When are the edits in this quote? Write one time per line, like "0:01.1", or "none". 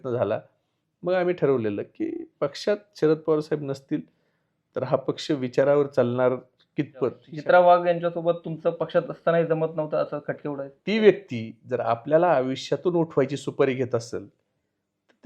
0:07.3
0:10.7